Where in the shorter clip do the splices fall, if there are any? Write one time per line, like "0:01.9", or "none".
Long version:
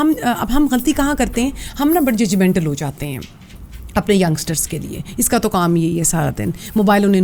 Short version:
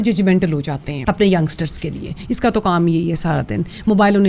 0:00.9

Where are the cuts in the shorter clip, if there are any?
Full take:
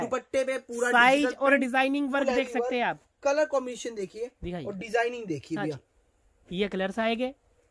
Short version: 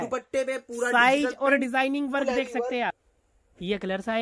0:03.1

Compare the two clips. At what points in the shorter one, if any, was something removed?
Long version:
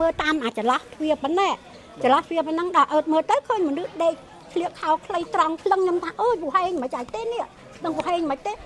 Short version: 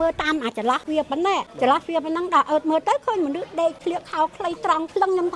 0:01.1
0:03.8

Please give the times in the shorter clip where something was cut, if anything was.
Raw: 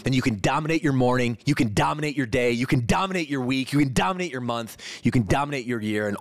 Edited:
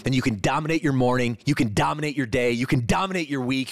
none

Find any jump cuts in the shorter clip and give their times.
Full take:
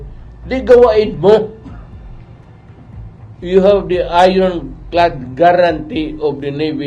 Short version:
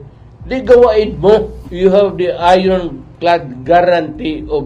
0:01.6

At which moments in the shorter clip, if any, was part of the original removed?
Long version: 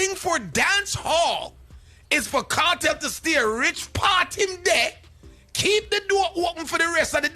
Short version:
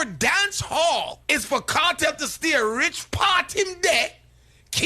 0:01.2

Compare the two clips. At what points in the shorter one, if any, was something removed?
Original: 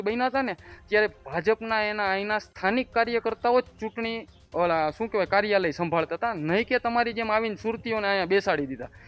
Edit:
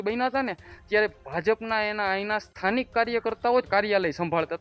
0:03.7

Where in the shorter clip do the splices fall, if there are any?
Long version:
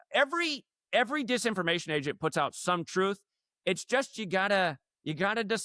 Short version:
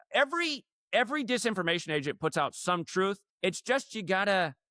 0:03.3

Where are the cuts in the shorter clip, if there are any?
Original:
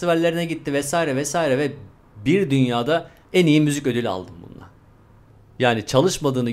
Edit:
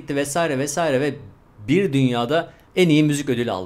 none

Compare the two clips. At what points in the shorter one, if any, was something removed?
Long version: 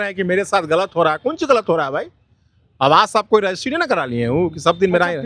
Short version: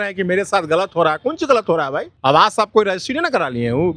0:02.1

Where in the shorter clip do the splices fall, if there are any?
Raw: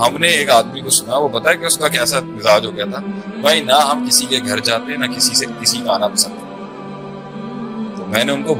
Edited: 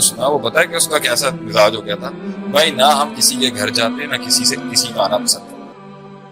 0:05.2

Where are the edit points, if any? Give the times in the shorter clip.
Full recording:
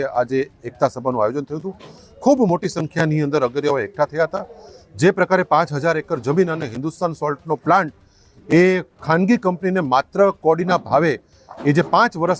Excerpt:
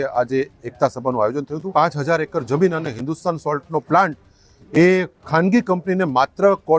0:01.7

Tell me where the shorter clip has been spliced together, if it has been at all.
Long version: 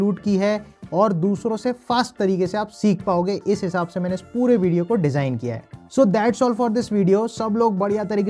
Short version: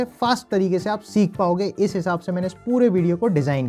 none

